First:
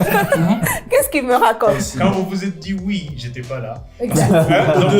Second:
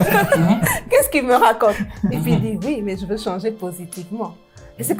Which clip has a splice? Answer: first; 1 cut; at 1.9 s

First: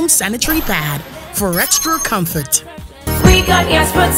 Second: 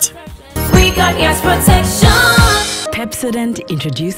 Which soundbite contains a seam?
second; 1 cut; at 2.8 s

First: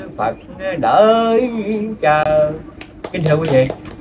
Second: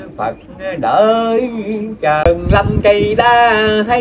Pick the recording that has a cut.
second; 1 cut; at 2.2 s

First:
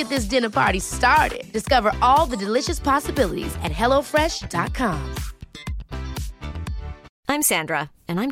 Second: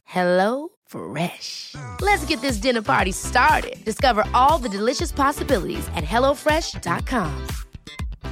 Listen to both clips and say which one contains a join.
first; 1 cut; at 7.1 s

